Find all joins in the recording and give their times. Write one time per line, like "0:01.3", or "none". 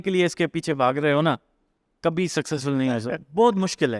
none